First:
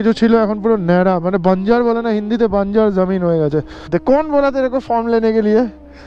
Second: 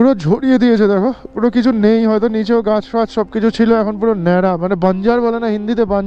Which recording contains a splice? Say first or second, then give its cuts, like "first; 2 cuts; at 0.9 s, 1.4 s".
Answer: first; 1 cut; at 3.9 s